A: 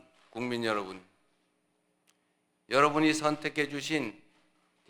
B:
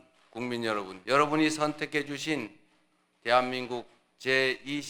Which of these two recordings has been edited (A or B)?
B